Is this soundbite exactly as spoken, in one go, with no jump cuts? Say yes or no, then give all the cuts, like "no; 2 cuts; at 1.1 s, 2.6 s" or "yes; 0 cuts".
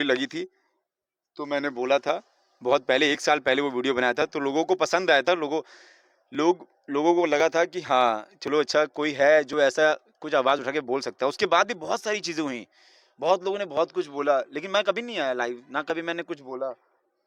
yes; 0 cuts